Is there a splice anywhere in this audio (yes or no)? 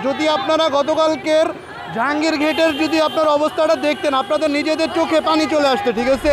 no